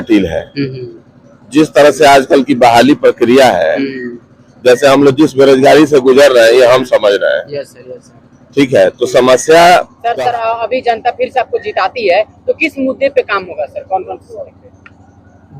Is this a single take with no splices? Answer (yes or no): no